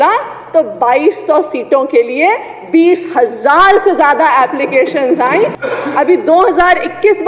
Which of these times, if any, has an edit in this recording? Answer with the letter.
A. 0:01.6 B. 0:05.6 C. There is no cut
B